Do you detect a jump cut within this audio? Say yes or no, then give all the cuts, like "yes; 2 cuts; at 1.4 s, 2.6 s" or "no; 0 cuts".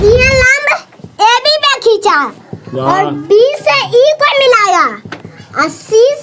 no; 0 cuts